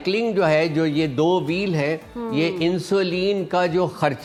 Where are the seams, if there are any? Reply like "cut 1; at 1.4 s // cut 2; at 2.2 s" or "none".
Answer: none